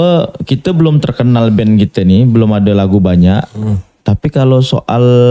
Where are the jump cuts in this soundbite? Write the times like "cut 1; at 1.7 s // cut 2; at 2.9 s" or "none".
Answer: none

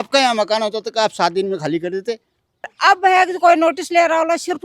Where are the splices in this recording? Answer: cut 1; at 2.7 s

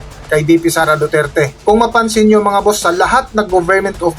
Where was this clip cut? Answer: cut 1; at 1.6 s

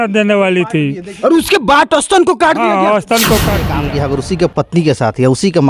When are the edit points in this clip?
cut 1; at 3.8 s

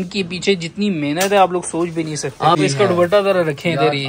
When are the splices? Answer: cut 1; at 2.6 s

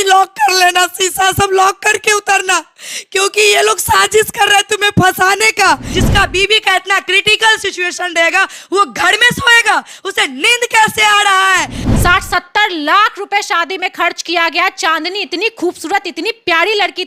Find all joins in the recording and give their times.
cut 1; at 5.8 s // cut 2; at 11.7 s

